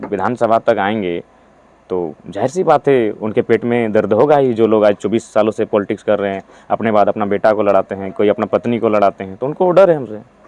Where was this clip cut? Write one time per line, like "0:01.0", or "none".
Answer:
none